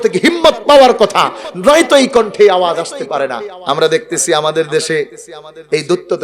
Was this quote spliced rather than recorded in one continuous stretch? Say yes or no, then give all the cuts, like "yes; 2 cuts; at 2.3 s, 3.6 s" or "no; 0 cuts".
yes; 1 cut; at 3.6 s